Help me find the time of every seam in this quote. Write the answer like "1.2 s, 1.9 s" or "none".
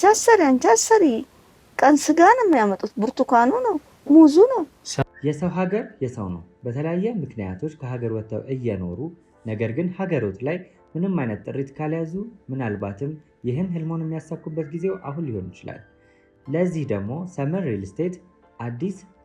4.8 s